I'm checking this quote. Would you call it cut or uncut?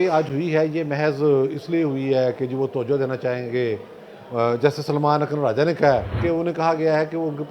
cut